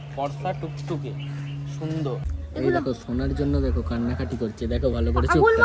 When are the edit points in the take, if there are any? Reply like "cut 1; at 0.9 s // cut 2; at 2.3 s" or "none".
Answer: cut 1; at 2.3 s